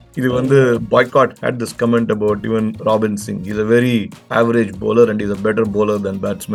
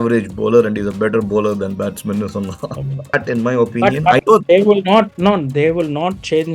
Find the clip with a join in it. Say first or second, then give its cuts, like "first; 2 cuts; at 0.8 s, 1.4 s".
second; 1 cut; at 3.1 s